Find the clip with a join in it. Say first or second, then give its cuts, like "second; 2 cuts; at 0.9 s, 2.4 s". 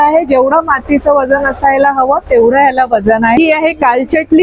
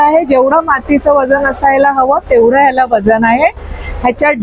first; 1 cut; at 3.4 s